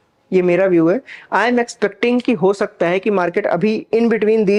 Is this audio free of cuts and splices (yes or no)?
yes